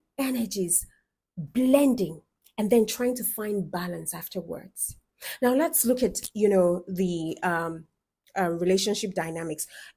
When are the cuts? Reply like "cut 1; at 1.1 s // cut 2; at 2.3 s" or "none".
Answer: none